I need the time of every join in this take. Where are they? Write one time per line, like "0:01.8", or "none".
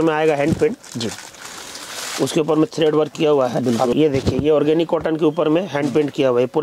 0:03.9